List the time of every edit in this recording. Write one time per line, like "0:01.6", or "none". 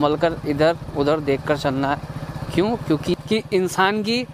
0:03.1